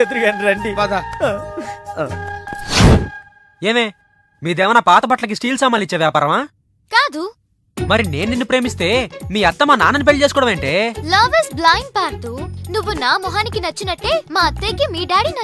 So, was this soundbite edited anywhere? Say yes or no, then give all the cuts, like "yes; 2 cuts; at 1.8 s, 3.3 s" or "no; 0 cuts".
no; 0 cuts